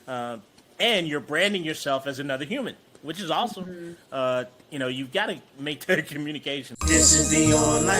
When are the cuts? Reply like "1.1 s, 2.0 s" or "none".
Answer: 6.7 s

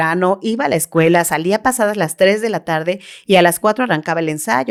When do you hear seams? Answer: none

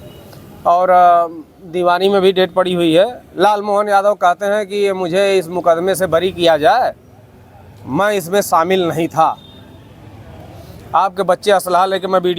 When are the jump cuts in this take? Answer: none

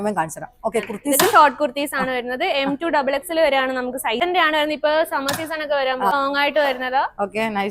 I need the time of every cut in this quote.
4.2 s, 6.1 s

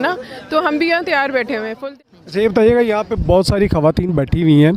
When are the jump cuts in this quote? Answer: 1.8 s

